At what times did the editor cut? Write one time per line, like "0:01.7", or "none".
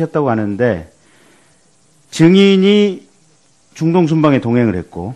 0:04.2